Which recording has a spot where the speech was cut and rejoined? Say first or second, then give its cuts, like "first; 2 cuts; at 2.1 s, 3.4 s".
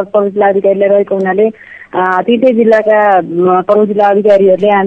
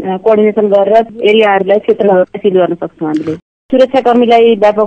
second; 2 cuts; at 1.1 s, 3.5 s